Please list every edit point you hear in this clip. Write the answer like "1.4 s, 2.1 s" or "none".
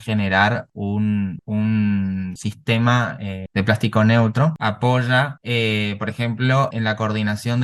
4.6 s, 6.7 s